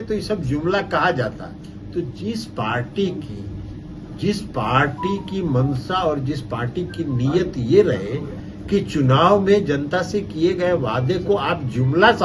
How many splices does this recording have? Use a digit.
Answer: 0